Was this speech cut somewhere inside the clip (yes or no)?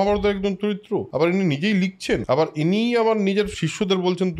yes